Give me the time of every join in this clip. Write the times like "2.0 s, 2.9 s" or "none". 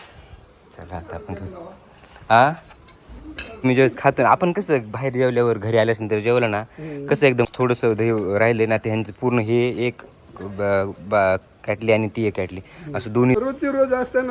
3.6 s, 7.5 s, 13.4 s